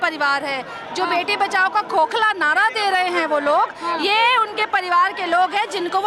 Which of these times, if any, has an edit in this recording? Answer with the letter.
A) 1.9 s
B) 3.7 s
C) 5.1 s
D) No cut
D